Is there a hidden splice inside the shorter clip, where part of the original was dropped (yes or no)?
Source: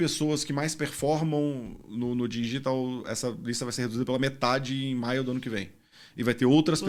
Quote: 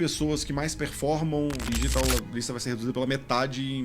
yes